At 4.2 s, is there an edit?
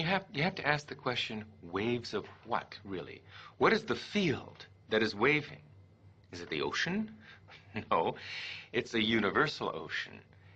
no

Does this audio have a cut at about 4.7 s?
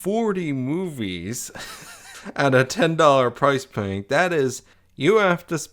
yes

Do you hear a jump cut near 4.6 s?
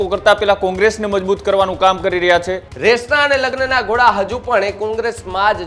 no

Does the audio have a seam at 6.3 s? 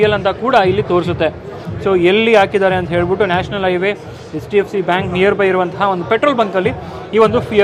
no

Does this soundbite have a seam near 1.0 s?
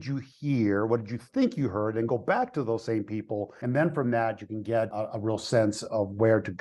no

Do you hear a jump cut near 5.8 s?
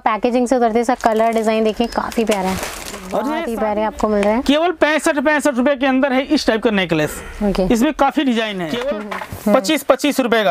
no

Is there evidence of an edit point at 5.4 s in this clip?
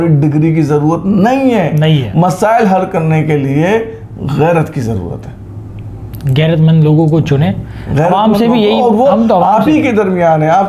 no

